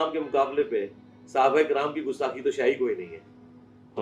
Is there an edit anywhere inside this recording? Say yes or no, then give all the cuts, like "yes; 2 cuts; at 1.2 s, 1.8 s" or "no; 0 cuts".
no; 0 cuts